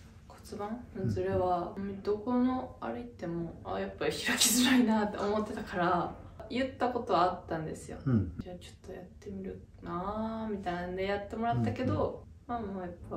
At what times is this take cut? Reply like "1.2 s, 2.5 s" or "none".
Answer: 1.7 s, 3.6 s, 6.4 s, 8.4 s, 12.3 s